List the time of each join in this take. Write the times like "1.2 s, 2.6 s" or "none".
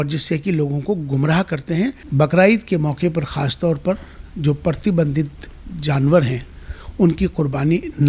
2.0 s